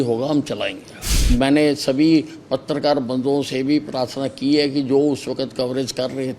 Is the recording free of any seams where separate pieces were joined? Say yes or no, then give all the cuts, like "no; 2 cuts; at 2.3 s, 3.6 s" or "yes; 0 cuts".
no; 1 cut; at 1.1 s